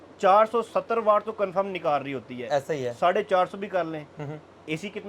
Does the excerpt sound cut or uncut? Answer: uncut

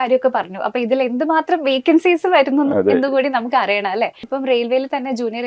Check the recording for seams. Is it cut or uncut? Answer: cut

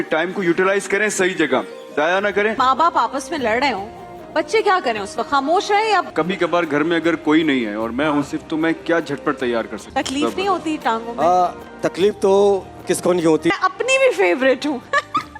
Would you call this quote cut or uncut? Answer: cut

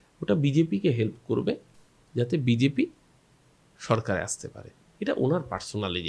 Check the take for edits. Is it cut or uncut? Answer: uncut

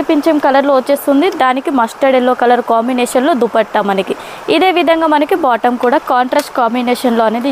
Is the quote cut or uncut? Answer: uncut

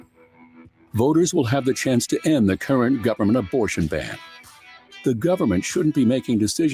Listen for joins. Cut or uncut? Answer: uncut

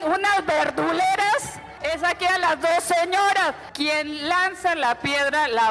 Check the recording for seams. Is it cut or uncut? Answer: cut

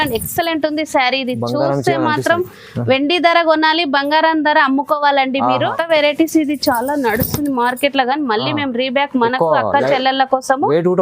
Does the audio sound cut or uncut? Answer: cut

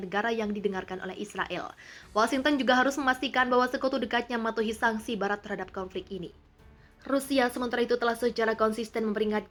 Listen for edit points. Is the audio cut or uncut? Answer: uncut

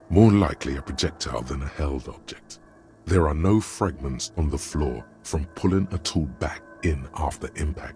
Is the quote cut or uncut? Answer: uncut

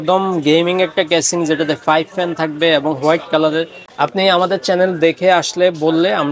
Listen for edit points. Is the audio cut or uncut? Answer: cut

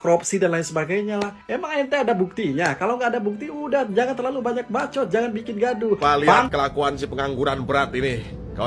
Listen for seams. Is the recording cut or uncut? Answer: cut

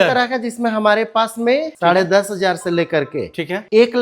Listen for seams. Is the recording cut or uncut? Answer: cut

